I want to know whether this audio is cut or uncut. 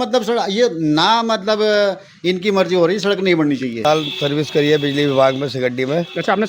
cut